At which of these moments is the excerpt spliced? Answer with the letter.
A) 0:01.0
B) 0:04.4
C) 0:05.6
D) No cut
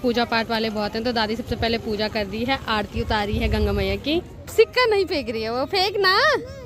B